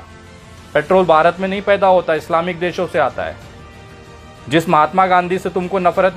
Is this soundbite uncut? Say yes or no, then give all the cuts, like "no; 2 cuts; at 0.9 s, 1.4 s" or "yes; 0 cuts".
yes; 0 cuts